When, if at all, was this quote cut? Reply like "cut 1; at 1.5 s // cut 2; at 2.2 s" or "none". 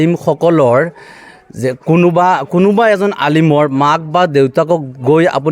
none